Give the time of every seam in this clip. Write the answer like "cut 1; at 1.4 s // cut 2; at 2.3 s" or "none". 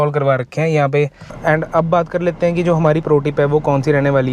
cut 1; at 1.3 s